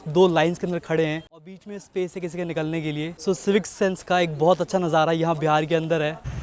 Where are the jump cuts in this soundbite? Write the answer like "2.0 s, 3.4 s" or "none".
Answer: none